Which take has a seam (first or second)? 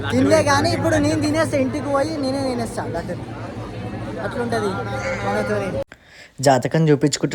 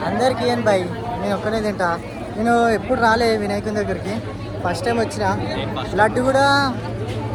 first